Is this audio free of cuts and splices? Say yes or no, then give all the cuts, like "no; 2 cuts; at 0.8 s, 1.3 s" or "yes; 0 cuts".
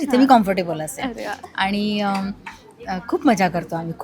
yes; 0 cuts